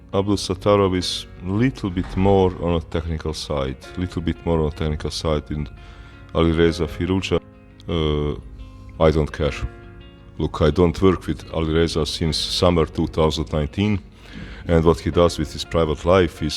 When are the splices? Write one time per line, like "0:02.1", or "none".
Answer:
0:07.4